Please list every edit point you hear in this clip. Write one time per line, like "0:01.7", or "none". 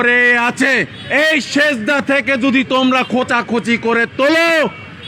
0:01.0